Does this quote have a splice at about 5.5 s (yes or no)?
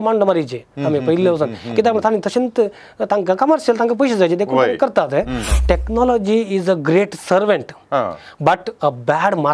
yes